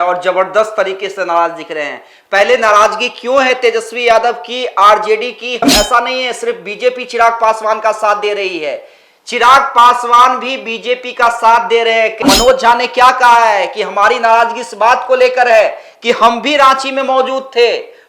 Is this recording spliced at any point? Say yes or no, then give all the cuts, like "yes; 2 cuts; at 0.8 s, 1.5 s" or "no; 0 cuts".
yes; 2 cuts; at 5.6 s, 12.2 s